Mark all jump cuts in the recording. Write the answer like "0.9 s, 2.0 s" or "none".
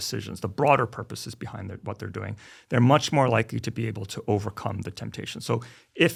none